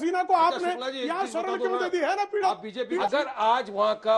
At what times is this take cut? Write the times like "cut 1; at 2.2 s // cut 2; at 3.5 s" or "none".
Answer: cut 1; at 3.0 s